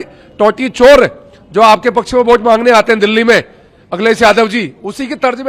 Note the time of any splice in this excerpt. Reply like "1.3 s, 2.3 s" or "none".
none